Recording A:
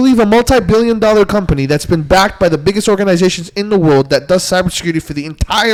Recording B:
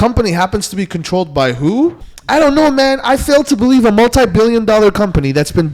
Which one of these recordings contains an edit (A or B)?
B